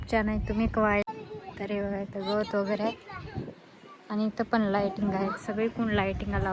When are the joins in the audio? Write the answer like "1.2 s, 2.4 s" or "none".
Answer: 1.1 s